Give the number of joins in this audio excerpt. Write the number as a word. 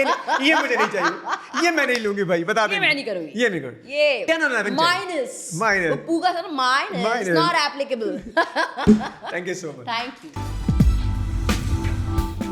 zero